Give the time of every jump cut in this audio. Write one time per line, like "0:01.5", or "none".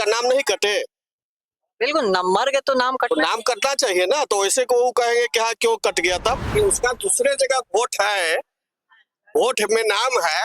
0:06.4